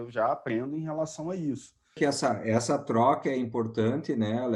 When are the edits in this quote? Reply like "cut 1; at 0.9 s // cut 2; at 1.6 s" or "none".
cut 1; at 1.9 s